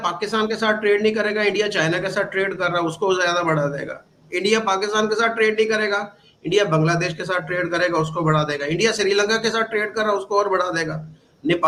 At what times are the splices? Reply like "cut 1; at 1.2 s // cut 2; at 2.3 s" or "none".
none